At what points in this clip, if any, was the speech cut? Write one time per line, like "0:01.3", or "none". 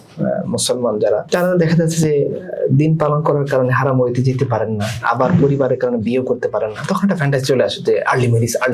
0:01.2